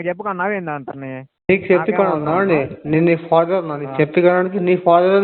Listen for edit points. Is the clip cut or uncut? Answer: cut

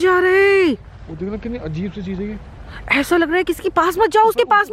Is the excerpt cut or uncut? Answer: uncut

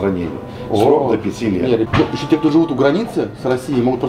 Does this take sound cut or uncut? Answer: cut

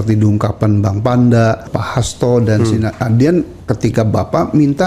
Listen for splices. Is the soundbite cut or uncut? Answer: cut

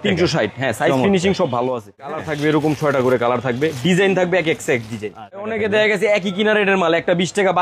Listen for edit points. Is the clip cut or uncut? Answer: cut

